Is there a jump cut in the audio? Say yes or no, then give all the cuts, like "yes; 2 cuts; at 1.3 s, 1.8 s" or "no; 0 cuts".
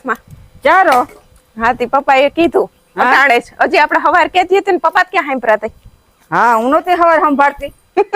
no; 0 cuts